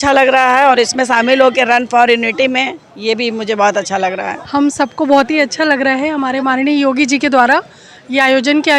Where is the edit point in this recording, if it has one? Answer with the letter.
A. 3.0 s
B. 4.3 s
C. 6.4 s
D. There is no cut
B